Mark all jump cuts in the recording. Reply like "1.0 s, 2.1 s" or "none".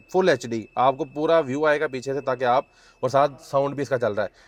none